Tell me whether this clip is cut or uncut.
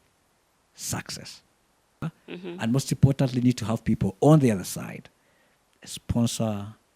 cut